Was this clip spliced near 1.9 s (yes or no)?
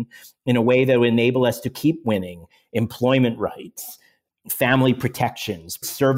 no